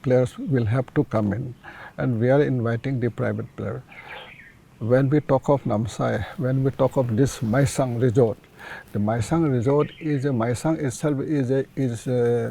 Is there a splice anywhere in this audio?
no; 0 cuts

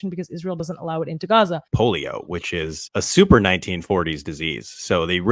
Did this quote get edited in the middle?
yes; 1 cut; at 1.7 s

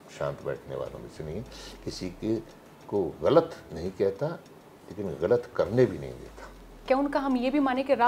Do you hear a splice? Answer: yes; 1 cut; at 6.8 s

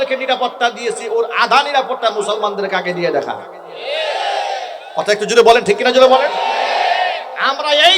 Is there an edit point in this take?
no; 0 cuts

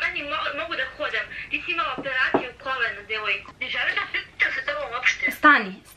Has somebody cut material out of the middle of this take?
yes; 1 cut; at 3.5 s

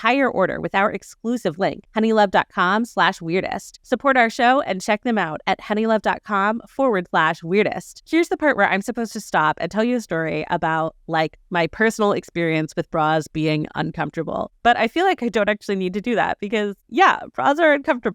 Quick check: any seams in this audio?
no; 0 cuts

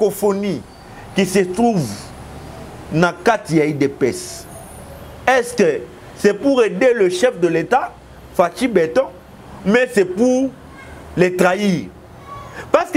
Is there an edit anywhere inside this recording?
no; 0 cuts

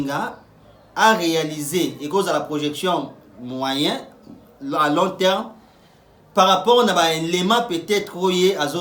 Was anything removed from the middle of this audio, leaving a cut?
no; 0 cuts

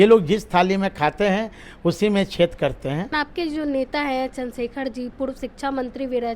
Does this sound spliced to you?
yes; 1 cut; at 3.2 s

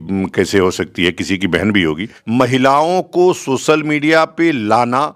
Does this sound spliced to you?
yes; 1 cut; at 2.1 s

